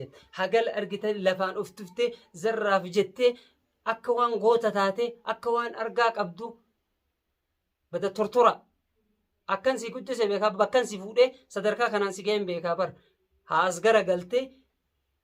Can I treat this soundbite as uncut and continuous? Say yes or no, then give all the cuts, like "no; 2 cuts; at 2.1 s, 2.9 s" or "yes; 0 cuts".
yes; 0 cuts